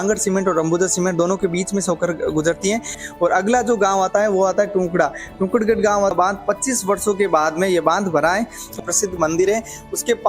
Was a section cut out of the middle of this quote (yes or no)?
yes